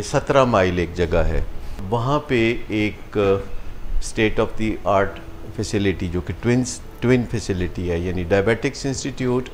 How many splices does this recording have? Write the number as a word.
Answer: one